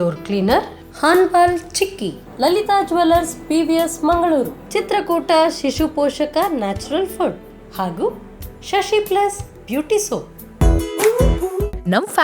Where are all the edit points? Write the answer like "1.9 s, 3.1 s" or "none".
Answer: 10.4 s